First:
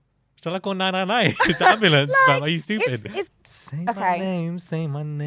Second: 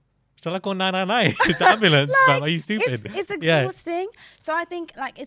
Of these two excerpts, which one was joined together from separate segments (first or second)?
first